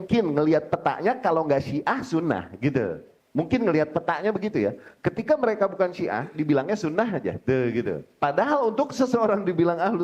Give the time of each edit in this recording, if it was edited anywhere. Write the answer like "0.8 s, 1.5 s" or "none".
3.1 s, 8.1 s